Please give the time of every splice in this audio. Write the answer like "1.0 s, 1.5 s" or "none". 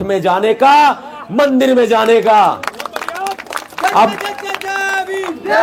none